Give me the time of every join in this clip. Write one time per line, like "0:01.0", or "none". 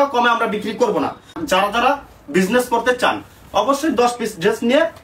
0:01.4